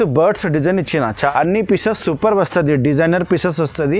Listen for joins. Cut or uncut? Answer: cut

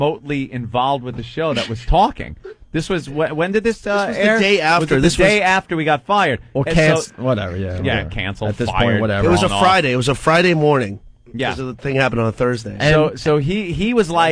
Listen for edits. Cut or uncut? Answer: cut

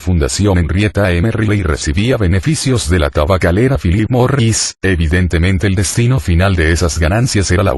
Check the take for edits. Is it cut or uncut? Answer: cut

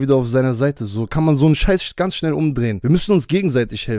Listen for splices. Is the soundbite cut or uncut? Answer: cut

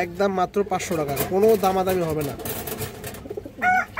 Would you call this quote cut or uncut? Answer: uncut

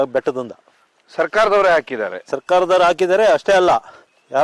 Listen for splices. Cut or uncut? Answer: uncut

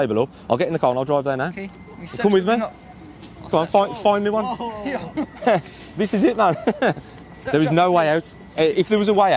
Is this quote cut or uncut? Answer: uncut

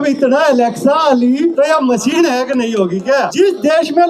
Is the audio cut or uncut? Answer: cut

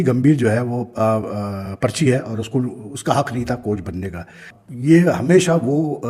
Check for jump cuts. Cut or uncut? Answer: uncut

